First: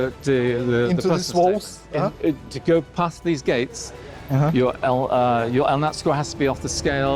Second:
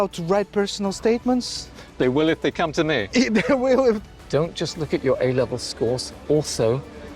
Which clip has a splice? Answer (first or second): second